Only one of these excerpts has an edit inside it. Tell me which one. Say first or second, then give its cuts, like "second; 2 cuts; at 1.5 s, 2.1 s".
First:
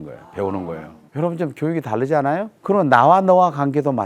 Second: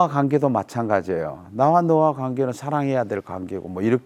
first; 2 cuts; at 1.0 s, 2.5 s